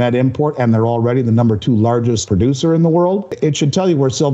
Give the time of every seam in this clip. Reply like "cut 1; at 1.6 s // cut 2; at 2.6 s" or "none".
cut 1; at 2.2 s // cut 2; at 3.3 s